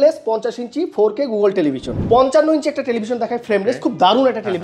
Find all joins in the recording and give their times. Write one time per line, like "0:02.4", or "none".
0:01.9

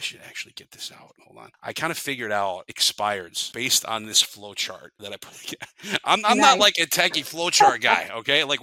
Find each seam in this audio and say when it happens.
0:01.2
0:02.8
0:03.4
0:04.9

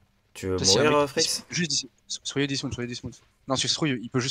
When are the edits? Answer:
none

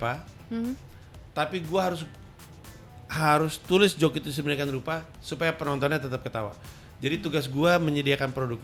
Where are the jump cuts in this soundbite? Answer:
none

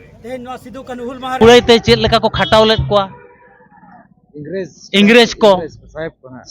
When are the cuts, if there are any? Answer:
0:01.3

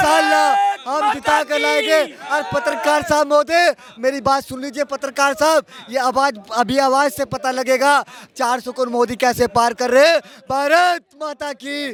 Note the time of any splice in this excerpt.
none

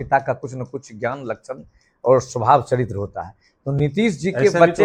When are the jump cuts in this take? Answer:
none

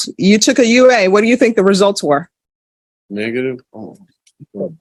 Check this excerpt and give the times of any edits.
none

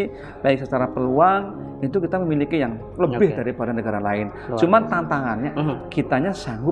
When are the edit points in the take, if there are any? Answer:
none

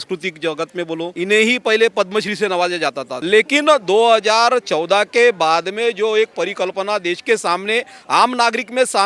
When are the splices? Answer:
0:01.1
0:03.1

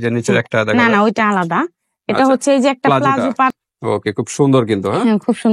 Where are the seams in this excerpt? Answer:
0:03.5

